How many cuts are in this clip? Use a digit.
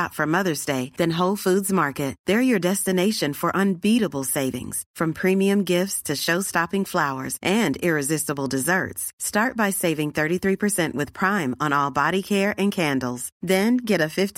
0